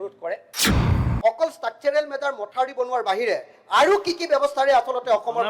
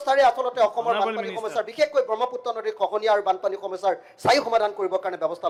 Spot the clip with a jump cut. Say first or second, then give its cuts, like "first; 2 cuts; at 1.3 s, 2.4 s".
first; 1 cut; at 0.9 s